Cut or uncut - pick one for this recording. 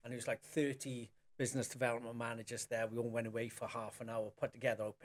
uncut